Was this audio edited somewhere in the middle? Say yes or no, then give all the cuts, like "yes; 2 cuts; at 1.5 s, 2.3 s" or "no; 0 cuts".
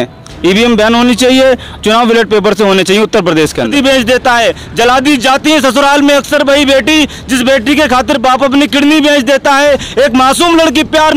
yes; 1 cut; at 3.7 s